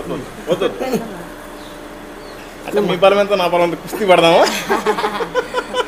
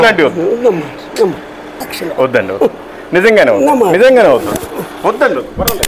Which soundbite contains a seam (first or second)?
second